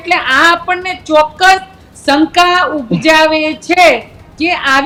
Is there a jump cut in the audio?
no; 0 cuts

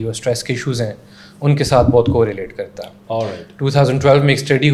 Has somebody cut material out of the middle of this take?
no; 0 cuts

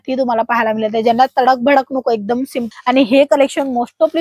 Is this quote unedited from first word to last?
no; 1 cut; at 2.6 s

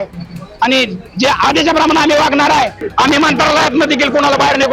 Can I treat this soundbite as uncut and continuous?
no; 1 cut; at 2.8 s

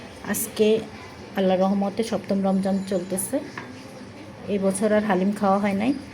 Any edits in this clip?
no; 0 cuts

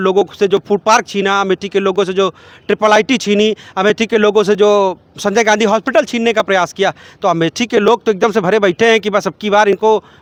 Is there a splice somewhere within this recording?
no; 0 cuts

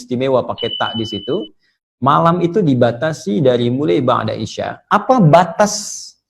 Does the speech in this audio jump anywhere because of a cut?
yes; 1 cut; at 4.7 s

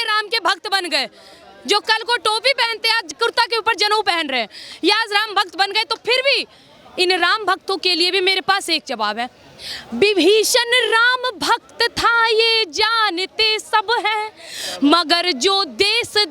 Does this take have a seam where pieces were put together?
yes; 1 cut; at 3.1 s

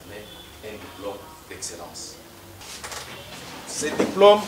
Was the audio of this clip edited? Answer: yes; 1 cut; at 2.6 s

